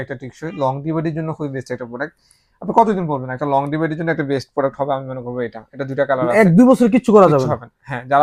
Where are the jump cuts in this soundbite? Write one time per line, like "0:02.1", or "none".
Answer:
none